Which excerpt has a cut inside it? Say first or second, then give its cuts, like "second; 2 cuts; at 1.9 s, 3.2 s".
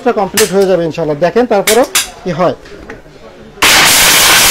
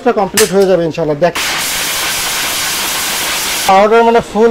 second; 2 cuts; at 1.3 s, 3.6 s